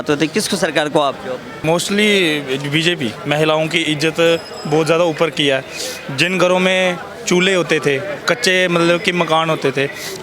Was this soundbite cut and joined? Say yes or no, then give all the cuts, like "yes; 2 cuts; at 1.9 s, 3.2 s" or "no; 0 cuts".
yes; 2 cuts; at 1.5 s, 3.2 s